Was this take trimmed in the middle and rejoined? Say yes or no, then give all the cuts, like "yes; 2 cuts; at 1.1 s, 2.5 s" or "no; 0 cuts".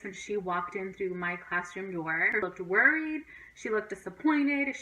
yes; 1 cut; at 2.4 s